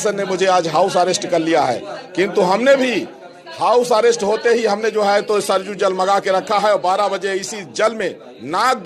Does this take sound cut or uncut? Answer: uncut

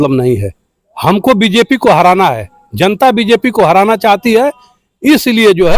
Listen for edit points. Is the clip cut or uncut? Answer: uncut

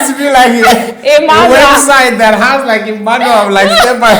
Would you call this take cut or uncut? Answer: uncut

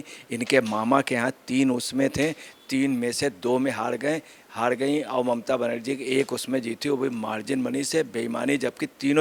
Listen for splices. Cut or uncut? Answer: uncut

